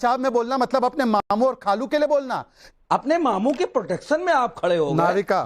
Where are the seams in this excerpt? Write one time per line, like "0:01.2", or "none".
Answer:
0:02.6

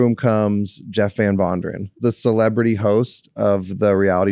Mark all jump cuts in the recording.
0:02.0

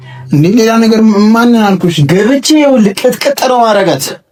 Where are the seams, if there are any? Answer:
none

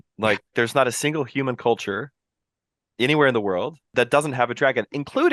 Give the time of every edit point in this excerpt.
0:03.9

